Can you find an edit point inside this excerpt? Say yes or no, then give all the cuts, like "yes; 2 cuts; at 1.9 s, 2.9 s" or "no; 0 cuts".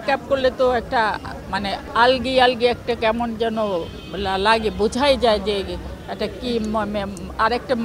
no; 0 cuts